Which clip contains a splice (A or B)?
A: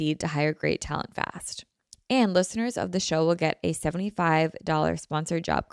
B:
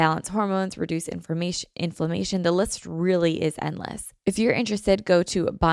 B